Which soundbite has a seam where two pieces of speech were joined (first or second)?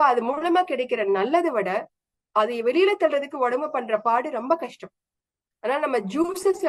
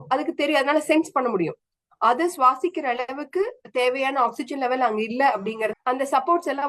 second